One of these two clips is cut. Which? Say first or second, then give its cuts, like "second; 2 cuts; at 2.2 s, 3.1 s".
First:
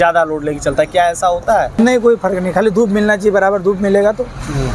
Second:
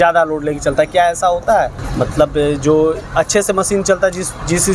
first; 1 cut; at 1.7 s